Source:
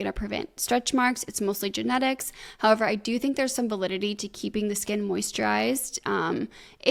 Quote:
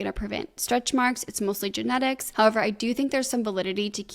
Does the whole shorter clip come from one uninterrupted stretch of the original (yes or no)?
no